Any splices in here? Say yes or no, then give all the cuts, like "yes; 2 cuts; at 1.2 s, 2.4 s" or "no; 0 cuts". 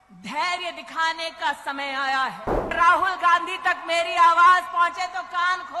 yes; 1 cut; at 2.7 s